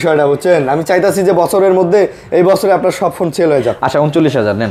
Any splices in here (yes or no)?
no